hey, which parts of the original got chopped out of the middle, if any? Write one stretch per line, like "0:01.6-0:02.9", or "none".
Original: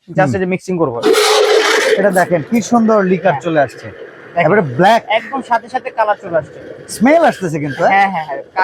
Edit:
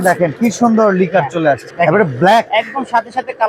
0:03.8-0:04.2